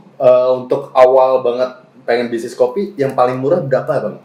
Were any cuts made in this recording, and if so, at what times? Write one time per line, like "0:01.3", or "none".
none

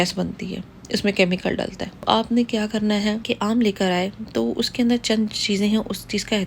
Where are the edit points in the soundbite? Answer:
0:02.0
0:03.2

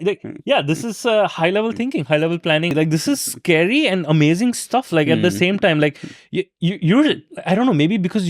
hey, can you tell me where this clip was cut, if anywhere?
0:02.7

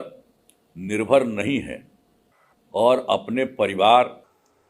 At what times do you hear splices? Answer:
none

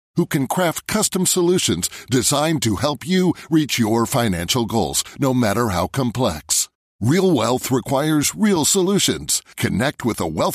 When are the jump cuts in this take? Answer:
none

